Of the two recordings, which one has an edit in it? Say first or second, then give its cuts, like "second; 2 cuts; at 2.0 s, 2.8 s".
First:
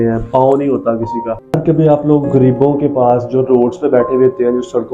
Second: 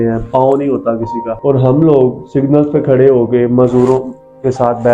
first; 1 cut; at 1.3 s